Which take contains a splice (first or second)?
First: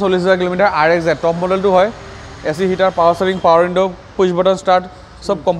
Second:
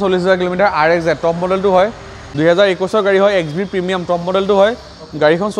second